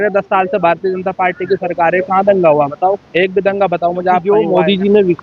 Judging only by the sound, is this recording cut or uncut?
cut